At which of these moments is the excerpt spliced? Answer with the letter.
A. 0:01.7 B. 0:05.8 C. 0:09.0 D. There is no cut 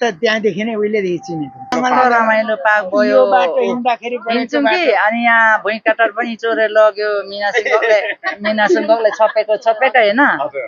A